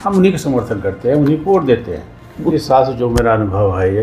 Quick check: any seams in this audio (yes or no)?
yes